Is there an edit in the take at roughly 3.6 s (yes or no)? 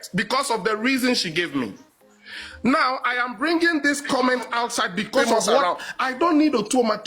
no